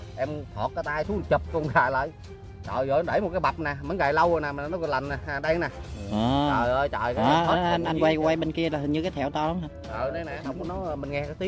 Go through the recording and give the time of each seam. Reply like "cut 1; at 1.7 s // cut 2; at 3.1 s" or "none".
cut 1; at 10.3 s